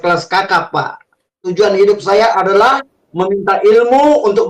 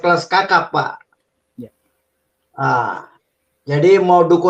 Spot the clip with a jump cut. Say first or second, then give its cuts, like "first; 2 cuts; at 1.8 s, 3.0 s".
first; 1 cut; at 1.4 s